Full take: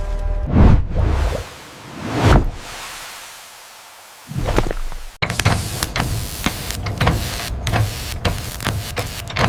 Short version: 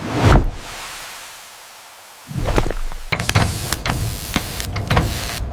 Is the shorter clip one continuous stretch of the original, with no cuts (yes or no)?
no